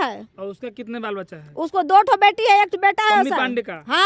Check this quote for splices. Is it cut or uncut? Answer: uncut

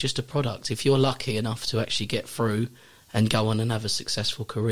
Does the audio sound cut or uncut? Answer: uncut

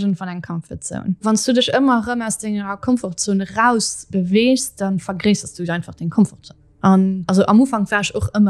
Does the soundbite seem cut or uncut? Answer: cut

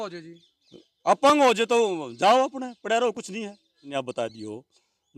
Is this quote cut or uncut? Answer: cut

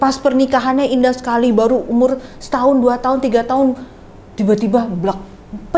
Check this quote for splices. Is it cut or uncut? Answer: uncut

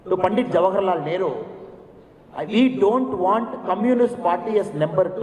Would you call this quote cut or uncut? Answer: uncut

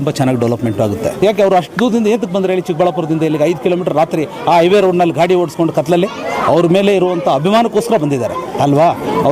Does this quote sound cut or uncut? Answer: cut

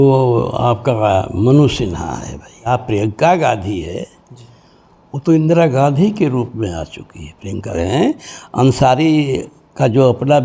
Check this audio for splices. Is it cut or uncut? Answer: cut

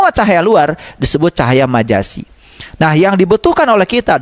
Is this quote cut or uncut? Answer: uncut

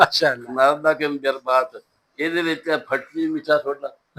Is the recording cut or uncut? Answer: uncut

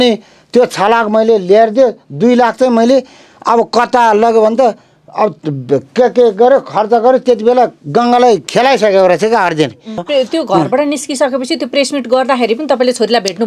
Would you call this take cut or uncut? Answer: cut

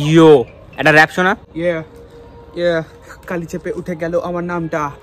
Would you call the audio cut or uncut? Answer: cut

